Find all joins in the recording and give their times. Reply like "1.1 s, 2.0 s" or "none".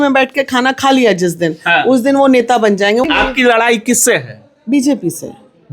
3.0 s